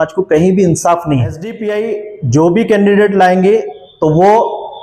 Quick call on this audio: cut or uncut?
cut